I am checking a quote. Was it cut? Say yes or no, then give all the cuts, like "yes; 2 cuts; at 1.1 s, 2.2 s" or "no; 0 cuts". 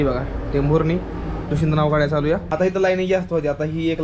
yes; 1 cut; at 2.4 s